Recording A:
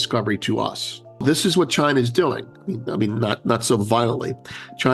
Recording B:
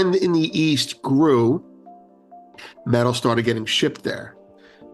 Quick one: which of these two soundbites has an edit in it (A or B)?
A